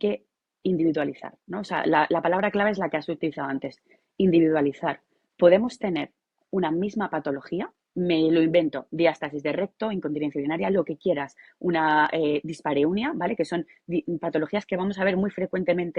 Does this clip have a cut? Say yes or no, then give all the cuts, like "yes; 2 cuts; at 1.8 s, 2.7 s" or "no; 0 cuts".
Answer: no; 0 cuts